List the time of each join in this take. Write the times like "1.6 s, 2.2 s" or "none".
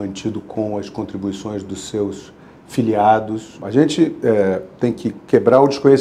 3.6 s